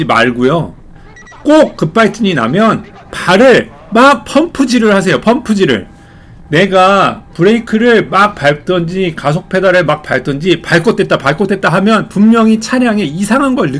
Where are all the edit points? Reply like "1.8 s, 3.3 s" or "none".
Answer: none